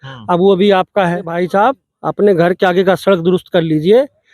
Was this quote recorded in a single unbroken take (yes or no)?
no